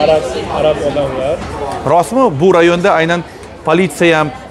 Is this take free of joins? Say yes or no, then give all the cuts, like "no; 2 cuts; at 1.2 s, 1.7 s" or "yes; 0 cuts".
yes; 0 cuts